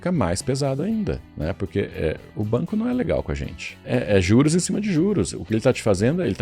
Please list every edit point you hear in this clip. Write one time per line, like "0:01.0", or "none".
0:01.3
0:02.3
0:03.8